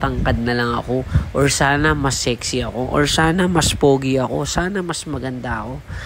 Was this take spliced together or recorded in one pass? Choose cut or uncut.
uncut